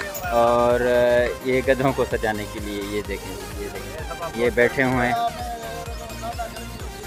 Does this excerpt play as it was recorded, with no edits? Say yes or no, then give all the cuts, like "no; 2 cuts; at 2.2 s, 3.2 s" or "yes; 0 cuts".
yes; 0 cuts